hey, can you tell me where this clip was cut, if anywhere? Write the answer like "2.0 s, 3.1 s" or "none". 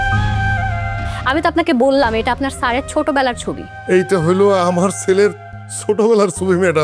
1.1 s, 3.7 s

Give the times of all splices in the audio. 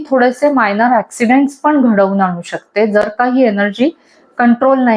none

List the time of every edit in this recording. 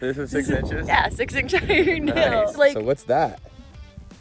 2.5 s

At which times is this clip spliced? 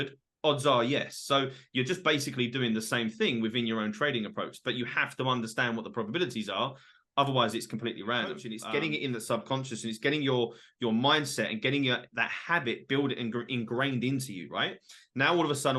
8.5 s

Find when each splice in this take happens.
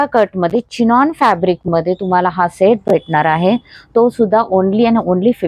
none

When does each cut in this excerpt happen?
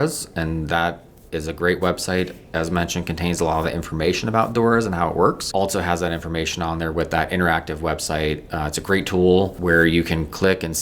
5.4 s, 9.5 s

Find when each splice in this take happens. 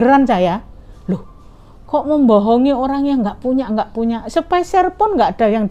none

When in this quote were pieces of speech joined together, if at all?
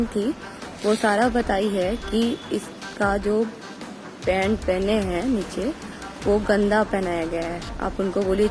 none

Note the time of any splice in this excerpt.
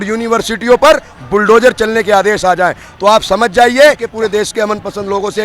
4.1 s

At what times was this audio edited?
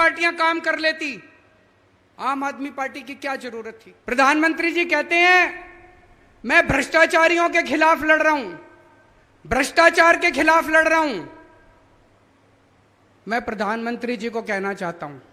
3.9 s

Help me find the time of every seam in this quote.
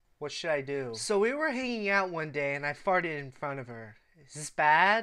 1.0 s

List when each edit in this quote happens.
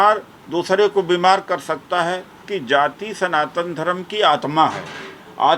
2.4 s

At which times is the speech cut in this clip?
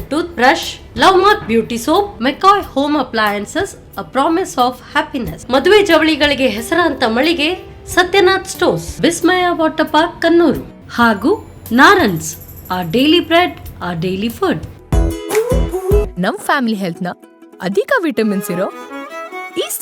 14.7 s

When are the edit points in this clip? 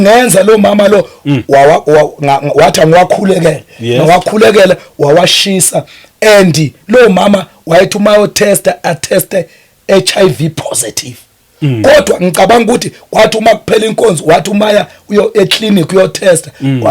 none

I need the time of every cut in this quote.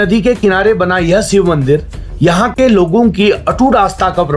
none

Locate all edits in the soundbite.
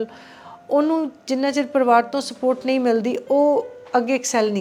none

